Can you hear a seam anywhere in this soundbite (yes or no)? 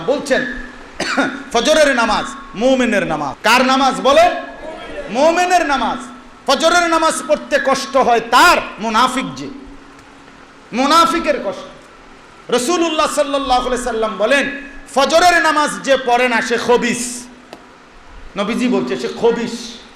yes